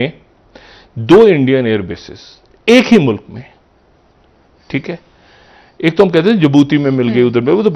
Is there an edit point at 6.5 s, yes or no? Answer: no